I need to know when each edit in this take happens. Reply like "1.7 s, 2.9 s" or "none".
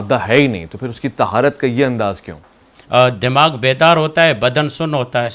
2.7 s